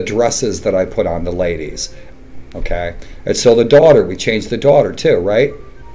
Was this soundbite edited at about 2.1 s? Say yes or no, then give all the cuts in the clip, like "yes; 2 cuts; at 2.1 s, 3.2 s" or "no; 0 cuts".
yes; 1 cut; at 2.1 s